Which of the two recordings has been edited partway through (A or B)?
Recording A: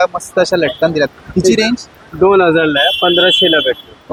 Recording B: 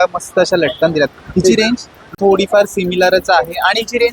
B